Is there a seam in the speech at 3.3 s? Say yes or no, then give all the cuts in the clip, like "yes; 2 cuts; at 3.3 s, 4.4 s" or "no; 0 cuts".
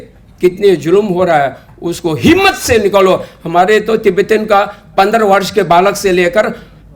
no; 0 cuts